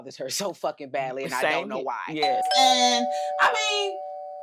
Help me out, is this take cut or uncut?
cut